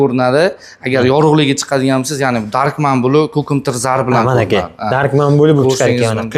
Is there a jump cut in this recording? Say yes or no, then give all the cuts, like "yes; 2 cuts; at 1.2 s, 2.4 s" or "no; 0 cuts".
no; 0 cuts